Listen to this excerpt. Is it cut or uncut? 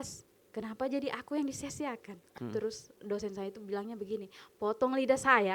cut